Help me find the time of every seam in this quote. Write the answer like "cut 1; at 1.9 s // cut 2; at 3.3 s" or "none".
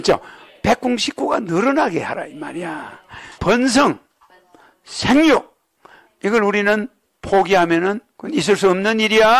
cut 1; at 3.4 s // cut 2; at 8.1 s

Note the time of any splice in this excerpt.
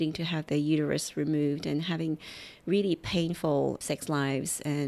cut 1; at 3.8 s

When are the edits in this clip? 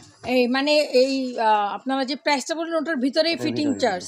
none

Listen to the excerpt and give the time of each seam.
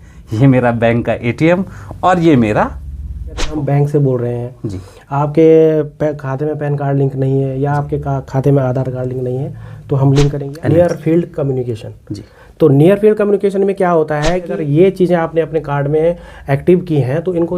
cut 1; at 3.5 s // cut 2; at 10.4 s // cut 3; at 14.5 s

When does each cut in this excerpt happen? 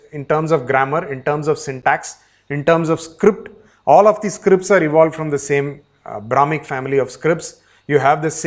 none

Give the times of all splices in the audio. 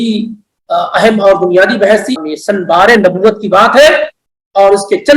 cut 1; at 2.2 s

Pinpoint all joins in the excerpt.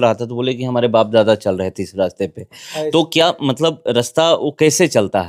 none

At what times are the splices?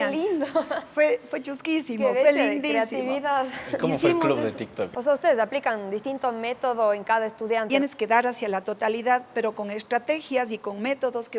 cut 1; at 4.9 s // cut 2; at 7.7 s

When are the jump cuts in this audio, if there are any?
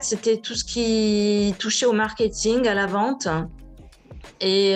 none

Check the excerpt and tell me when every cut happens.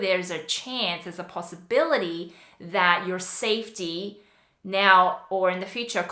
none

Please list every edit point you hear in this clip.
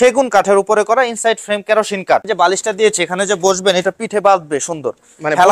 cut 1; at 2.3 s

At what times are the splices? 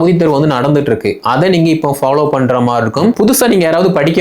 cut 1; at 3.2 s

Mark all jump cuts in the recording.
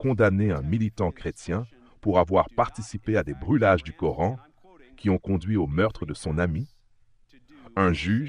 none

